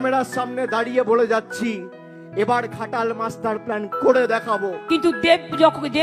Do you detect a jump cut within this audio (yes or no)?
yes